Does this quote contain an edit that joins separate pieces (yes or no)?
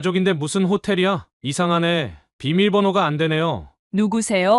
yes